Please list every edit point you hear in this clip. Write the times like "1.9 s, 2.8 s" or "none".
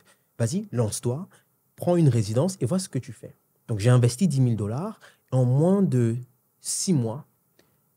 none